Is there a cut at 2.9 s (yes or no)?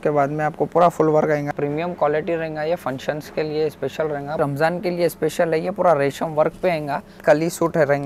no